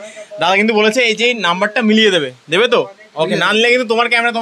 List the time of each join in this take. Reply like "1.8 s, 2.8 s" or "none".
none